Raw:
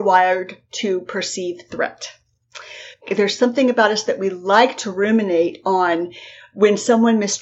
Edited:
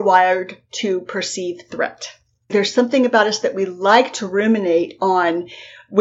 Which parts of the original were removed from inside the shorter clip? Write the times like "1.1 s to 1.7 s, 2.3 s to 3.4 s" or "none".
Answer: 2.5 s to 3.2 s